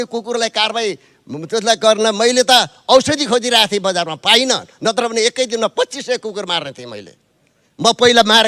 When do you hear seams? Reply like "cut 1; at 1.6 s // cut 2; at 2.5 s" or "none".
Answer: none